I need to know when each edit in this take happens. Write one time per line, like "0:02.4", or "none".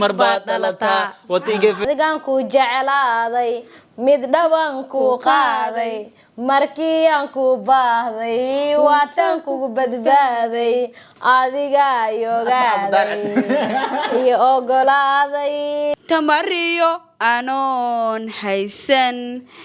0:01.8
0:15.9

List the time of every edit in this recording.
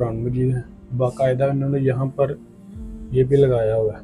none

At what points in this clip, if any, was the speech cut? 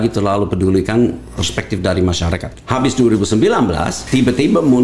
0:02.4
0:03.9

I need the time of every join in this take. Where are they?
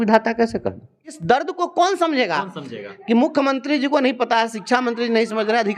0:01.2

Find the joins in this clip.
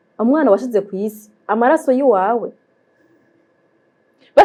none

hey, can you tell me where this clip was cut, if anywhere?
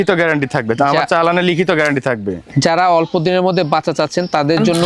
none

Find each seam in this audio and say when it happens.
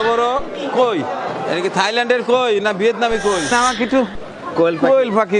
0:01.4
0:03.5

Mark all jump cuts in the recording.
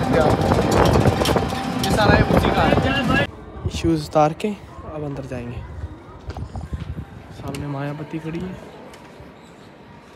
0:03.1

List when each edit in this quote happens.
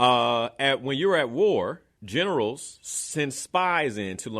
0:01.9

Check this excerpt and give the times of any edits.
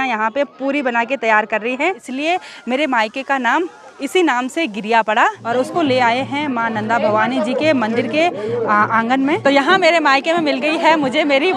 0:02.1
0:05.4
0:09.4

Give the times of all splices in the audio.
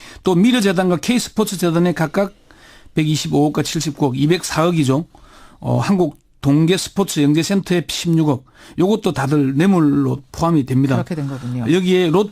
0:05.0

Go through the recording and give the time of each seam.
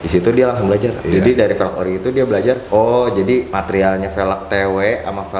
0:01.0
0:02.6
0:03.5

